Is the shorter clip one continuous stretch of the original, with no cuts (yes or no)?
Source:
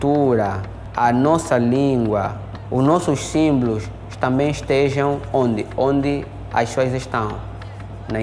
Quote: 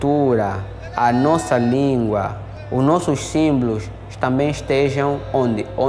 yes